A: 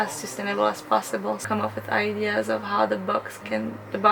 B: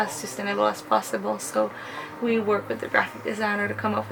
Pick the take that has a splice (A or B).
A